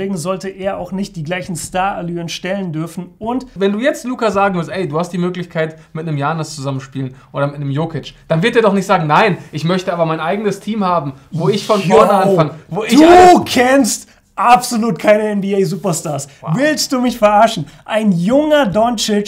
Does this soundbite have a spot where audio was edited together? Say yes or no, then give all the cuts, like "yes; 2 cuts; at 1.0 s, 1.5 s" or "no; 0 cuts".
yes; 1 cut; at 3.5 s